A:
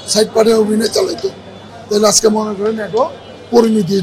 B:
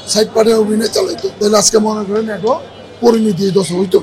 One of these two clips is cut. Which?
B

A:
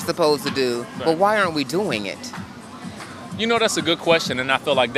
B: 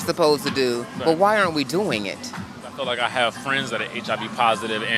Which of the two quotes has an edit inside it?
B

